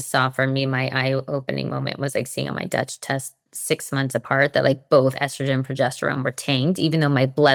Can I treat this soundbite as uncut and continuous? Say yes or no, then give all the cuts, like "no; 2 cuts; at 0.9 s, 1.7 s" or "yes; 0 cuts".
yes; 0 cuts